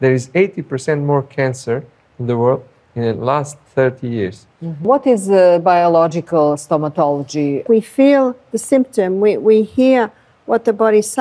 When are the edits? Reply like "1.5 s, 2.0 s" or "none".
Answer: 4.8 s, 7.6 s